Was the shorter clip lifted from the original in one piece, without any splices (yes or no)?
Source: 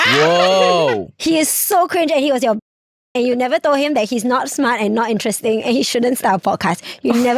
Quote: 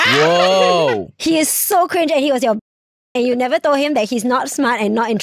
yes